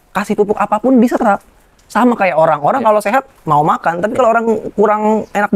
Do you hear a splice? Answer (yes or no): no